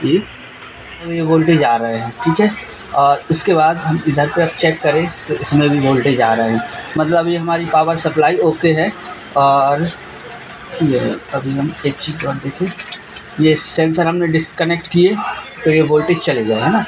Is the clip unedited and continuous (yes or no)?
no